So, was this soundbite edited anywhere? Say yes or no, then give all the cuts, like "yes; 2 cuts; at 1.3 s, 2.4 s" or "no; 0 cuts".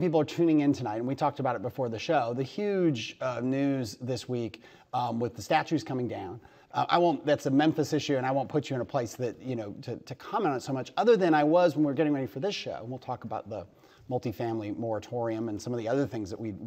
yes; 1 cut; at 7.9 s